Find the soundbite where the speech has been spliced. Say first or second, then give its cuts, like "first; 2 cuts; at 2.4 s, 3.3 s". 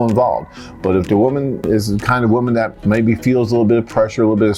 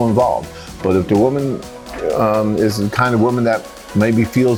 first; 2 cuts; at 1.6 s, 2.7 s